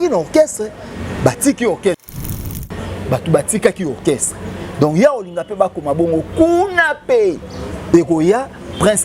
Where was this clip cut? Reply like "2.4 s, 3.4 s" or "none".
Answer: 2.2 s